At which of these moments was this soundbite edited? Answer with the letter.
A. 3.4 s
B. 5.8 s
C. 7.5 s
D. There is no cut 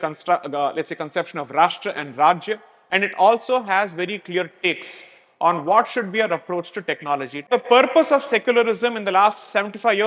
C